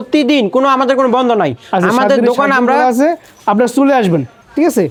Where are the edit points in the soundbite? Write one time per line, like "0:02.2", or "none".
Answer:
none